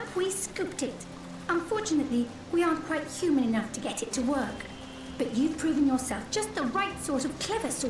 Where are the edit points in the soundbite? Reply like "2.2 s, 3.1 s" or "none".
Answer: none